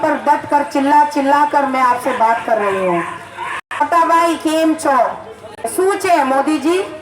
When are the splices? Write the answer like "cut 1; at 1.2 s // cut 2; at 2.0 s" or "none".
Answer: cut 1; at 3.8 s // cut 2; at 5.7 s